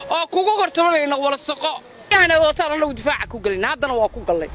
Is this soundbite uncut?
no; 1 cut; at 2.1 s

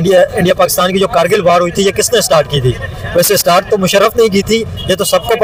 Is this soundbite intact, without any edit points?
yes; 0 cuts

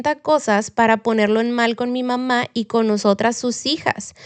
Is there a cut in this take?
no; 0 cuts

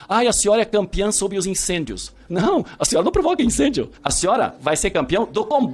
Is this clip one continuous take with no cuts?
no; 1 cut; at 3.9 s

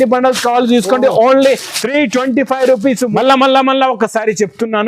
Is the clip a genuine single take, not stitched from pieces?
no; 1 cut; at 3.1 s

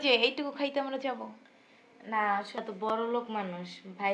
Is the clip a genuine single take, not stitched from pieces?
no; 1 cut; at 2.5 s

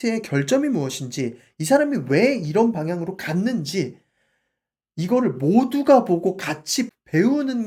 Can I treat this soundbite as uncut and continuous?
yes; 0 cuts

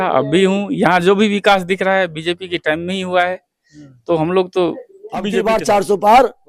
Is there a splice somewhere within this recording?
yes; 1 cut; at 5.3 s

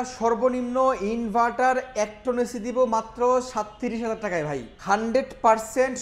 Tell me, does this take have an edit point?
yes; 1 cut; at 4.7 s

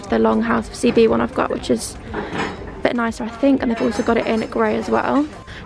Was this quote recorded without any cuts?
yes; 0 cuts

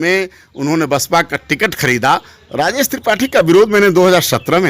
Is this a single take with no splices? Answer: no; 1 cut; at 2.4 s

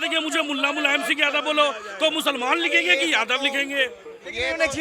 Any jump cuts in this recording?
no; 0 cuts

